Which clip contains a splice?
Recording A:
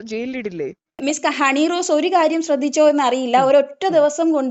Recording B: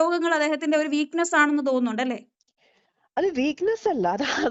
A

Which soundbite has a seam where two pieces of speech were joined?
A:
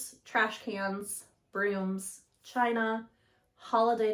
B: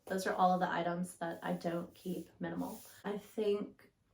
B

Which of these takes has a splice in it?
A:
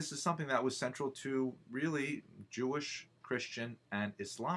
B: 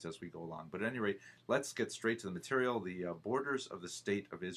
A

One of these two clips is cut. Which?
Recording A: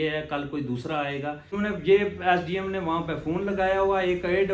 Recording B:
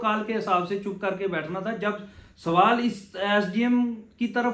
A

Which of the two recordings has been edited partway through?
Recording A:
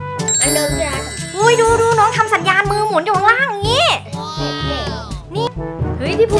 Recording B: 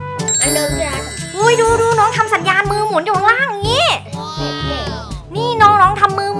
A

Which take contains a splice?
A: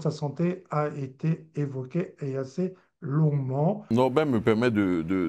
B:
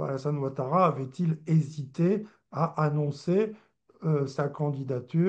A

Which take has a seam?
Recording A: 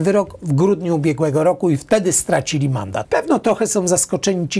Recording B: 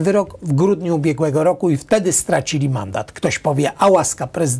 A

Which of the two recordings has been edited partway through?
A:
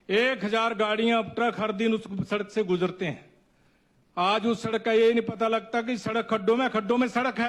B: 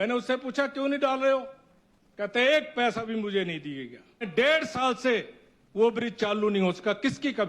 B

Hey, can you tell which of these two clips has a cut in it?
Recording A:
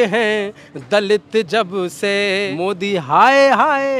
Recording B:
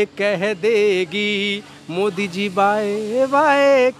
A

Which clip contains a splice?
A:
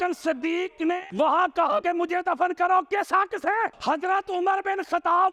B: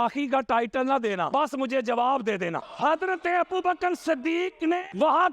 B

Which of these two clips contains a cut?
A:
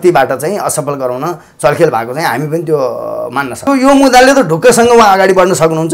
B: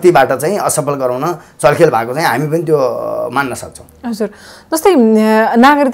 A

